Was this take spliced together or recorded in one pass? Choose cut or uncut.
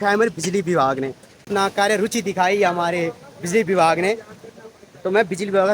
cut